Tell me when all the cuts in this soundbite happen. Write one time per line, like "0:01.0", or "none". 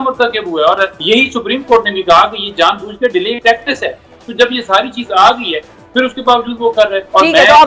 0:01.0